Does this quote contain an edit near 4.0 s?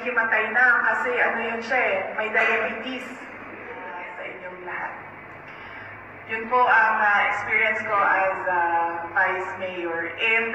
yes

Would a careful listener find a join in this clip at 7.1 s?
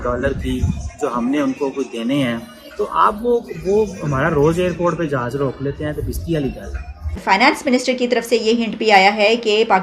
yes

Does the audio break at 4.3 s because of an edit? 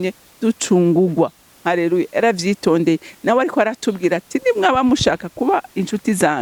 no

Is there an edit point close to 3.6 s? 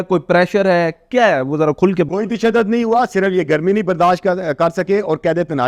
no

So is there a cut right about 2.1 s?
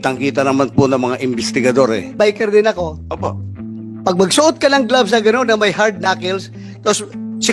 yes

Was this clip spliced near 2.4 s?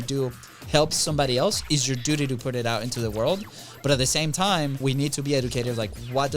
no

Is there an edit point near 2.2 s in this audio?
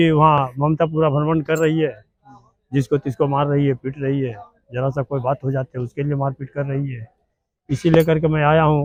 no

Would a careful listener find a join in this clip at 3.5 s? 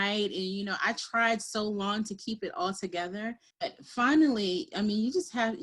yes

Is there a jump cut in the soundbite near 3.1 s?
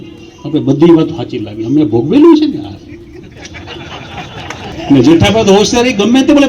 no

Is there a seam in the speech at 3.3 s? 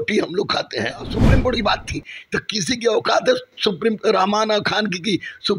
no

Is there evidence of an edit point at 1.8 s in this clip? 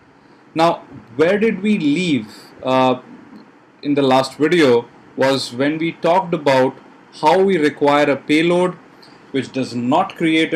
no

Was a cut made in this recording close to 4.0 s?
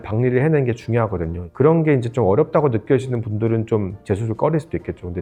no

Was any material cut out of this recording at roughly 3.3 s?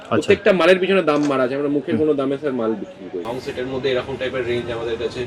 yes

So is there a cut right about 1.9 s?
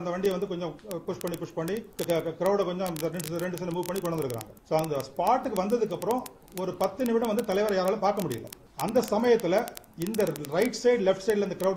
yes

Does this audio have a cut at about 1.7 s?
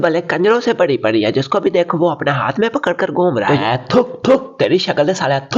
no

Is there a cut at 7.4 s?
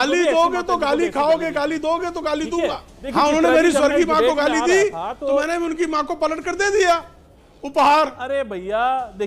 no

